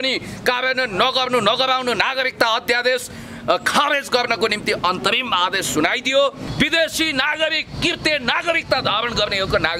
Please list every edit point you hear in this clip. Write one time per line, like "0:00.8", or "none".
0:06.4